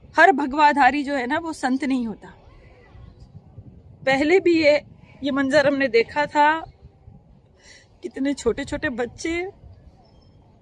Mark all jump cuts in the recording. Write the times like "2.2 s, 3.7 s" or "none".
3.3 s

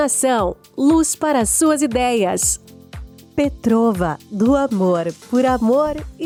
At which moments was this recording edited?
none

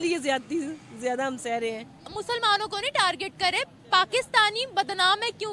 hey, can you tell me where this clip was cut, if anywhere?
2.1 s

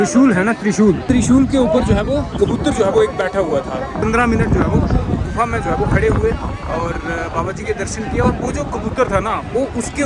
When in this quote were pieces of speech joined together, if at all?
1.0 s, 2.3 s, 4.0 s

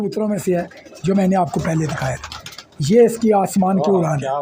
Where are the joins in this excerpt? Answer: none

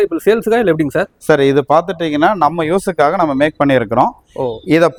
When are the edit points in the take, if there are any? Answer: none

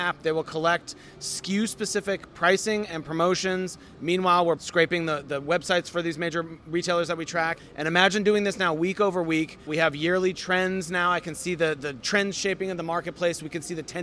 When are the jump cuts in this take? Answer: 4.6 s, 7.6 s, 9.7 s, 11.9 s

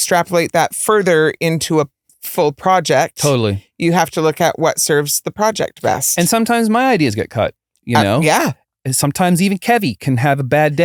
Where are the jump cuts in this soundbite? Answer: none

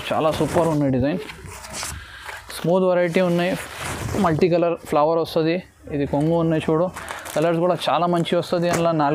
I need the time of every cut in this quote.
none

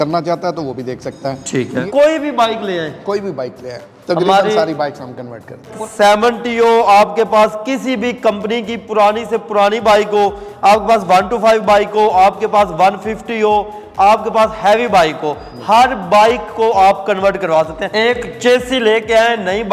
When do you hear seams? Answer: 1.8 s, 5.7 s, 17.8 s

